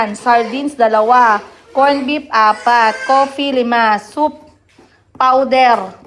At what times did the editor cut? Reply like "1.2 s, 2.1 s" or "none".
none